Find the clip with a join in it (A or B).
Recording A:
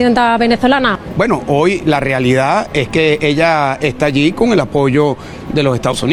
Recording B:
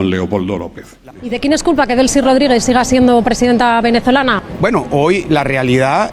B